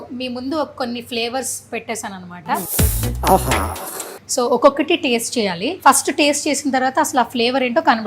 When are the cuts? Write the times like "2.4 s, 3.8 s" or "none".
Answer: 2.7 s, 4.2 s, 5.7 s